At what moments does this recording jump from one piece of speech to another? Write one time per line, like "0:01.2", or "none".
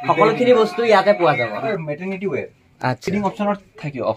0:01.7
0:03.0